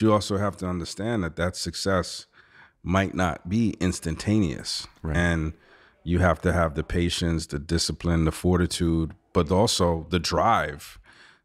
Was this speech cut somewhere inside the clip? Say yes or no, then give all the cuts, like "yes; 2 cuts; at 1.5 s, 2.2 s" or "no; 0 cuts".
no; 0 cuts